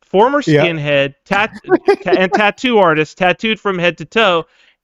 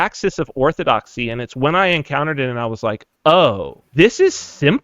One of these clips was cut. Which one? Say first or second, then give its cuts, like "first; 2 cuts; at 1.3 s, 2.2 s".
second; 1 cut; at 3.7 s